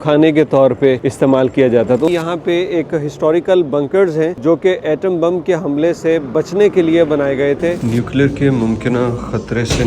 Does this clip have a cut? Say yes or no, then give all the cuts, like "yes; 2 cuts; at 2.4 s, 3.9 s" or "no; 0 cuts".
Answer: yes; 4 cuts; at 1.1 s, 2.1 s, 4.4 s, 7.8 s